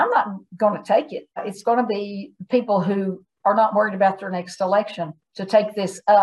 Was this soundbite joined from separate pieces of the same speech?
yes; 1 cut; at 1.4 s

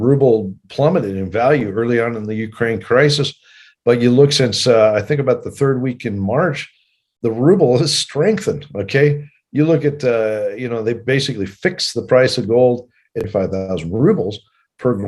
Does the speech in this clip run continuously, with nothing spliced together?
no; 1 cut; at 13.2 s

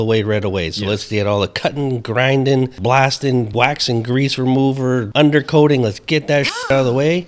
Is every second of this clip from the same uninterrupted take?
no; 3 cuts; at 2.8 s, 3.5 s, 5.1 s

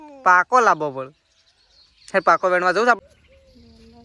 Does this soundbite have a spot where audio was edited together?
yes; 1 cut; at 3.0 s

